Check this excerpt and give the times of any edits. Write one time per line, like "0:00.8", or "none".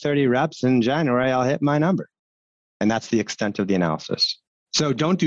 0:04.3